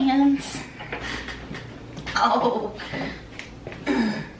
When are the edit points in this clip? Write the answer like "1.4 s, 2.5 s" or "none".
none